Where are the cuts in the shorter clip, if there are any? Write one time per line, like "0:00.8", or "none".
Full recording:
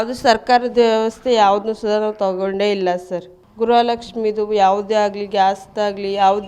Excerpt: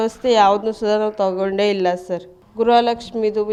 none